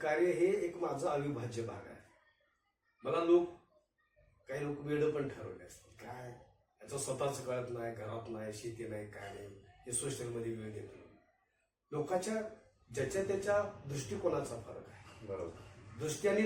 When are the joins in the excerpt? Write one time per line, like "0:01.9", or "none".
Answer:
none